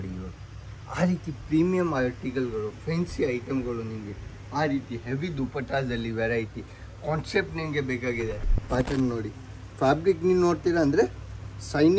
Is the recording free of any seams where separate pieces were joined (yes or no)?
no